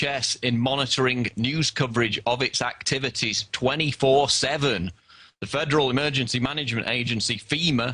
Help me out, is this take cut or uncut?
cut